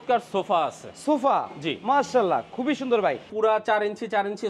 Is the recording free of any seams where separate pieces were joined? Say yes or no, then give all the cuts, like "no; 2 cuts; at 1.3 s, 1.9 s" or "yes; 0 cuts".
no; 1 cut; at 3.3 s